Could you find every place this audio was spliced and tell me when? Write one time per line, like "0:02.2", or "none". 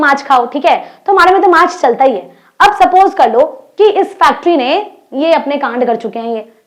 none